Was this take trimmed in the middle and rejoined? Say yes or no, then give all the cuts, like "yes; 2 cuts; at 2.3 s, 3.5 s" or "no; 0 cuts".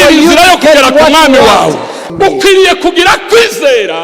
yes; 1 cut; at 2.0 s